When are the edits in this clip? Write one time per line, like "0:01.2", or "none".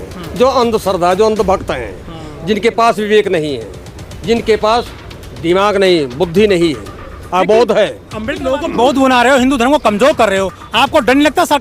0:08.4

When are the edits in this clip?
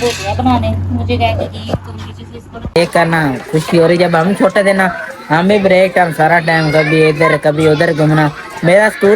0:02.8

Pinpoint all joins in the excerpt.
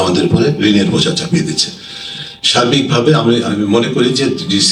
none

